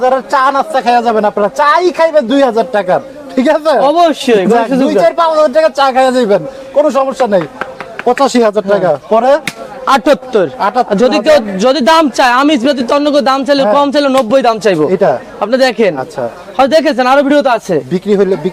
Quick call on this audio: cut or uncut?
uncut